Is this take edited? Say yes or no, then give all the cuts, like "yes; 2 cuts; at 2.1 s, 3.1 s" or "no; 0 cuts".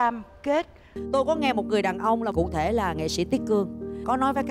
yes; 1 cut; at 1.0 s